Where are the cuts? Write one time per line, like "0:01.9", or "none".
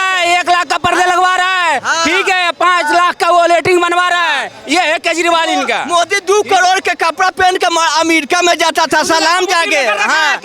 none